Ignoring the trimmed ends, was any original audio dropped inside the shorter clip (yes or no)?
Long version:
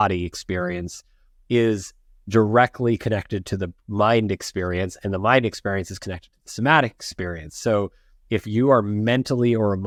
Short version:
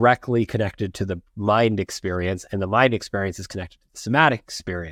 no